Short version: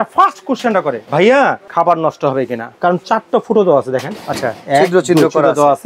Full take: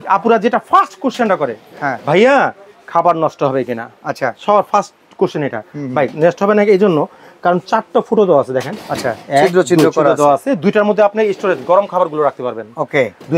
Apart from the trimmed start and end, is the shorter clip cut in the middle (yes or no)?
yes